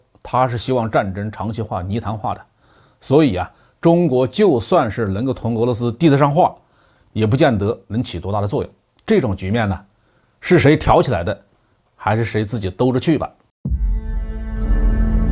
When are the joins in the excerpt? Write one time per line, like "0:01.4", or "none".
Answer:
0:13.4